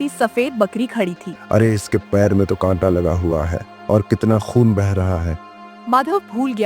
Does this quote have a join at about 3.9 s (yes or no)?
no